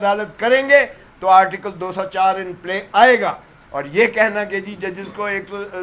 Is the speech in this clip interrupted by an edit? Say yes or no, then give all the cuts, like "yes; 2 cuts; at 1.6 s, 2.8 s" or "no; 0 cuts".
no; 0 cuts